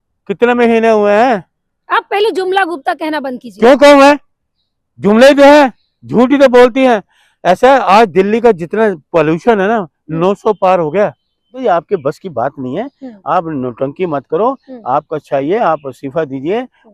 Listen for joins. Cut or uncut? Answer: cut